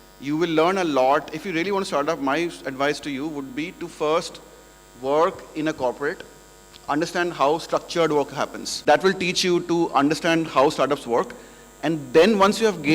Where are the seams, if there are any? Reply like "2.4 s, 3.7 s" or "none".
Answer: 8.6 s